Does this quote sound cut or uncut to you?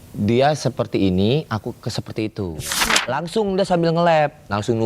cut